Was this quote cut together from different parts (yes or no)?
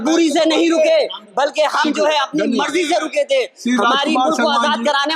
no